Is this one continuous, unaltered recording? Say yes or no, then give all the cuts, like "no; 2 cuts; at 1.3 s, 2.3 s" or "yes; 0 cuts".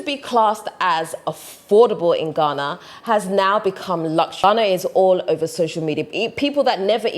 no; 1 cut; at 4.4 s